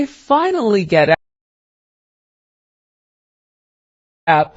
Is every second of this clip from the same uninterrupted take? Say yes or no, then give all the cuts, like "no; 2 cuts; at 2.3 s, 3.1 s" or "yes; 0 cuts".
yes; 0 cuts